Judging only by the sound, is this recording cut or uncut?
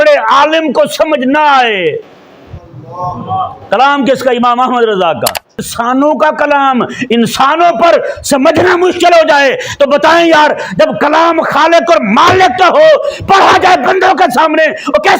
cut